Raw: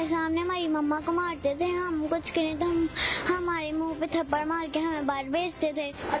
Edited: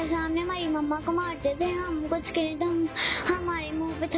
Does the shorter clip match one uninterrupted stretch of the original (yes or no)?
yes